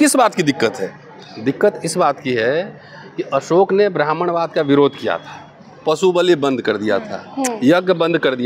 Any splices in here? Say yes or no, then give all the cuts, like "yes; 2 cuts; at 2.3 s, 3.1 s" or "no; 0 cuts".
no; 0 cuts